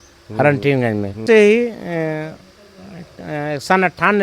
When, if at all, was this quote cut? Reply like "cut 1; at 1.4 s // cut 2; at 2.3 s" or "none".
cut 1; at 1.2 s